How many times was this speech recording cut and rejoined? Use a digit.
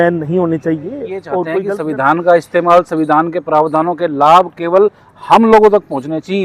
1